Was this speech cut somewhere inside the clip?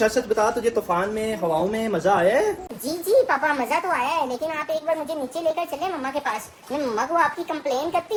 no; 0 cuts

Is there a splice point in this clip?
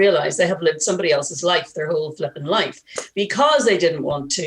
no; 0 cuts

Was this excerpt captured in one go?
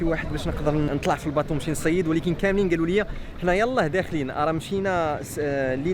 yes; 0 cuts

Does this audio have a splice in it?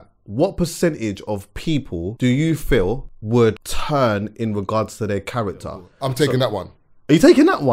yes; 4 cuts; at 2.1 s, 3.1 s, 3.7 s, 5.8 s

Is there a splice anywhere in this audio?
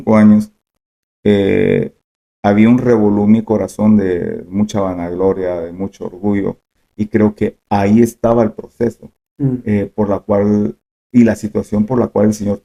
no; 0 cuts

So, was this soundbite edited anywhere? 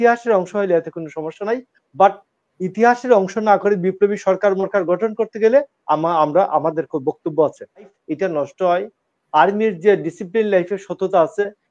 yes; 1 cut; at 8.0 s

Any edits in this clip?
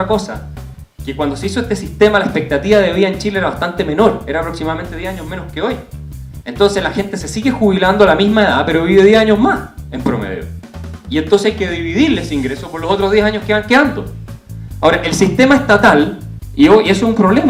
no; 0 cuts

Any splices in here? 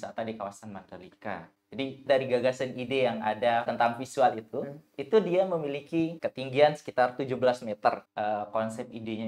yes; 4 cuts; at 2.0 s, 3.7 s, 6.2 s, 8.1 s

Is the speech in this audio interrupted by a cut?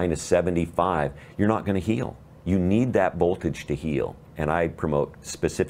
yes; 1 cut; at 4.3 s

